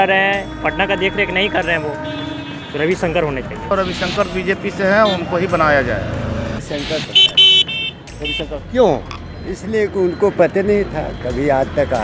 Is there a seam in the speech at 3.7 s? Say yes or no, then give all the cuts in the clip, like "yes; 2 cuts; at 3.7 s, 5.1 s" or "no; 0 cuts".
yes; 2 cuts; at 3.7 s, 6.6 s